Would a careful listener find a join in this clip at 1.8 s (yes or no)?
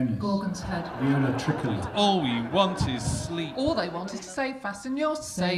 yes